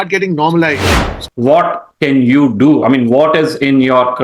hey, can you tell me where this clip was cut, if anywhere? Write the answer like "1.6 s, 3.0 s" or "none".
1.3 s